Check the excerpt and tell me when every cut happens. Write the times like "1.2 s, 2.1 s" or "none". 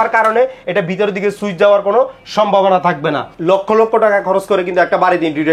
3.3 s